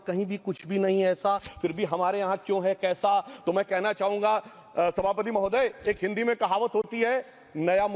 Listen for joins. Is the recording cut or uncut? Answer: uncut